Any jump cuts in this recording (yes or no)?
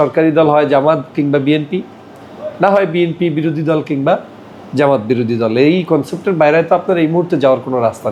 no